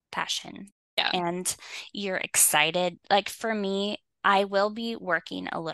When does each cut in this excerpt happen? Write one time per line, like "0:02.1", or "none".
none